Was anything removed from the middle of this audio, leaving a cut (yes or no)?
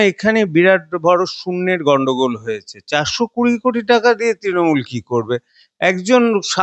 no